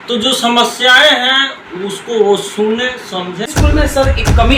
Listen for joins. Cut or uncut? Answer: cut